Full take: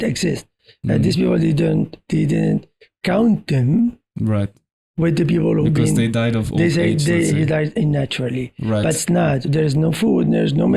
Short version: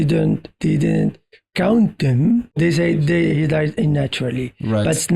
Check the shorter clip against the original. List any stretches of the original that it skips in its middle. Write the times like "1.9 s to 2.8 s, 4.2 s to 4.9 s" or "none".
4.0 s to 6.5 s